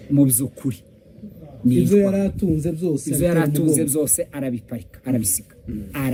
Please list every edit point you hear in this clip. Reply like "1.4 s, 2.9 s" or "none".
none